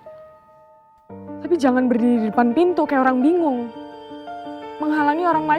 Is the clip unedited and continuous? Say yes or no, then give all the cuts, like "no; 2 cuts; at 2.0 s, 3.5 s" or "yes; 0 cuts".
yes; 0 cuts